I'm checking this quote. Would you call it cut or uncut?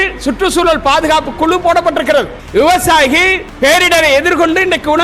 cut